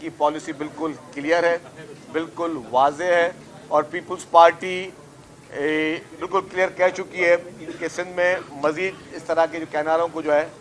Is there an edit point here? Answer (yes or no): no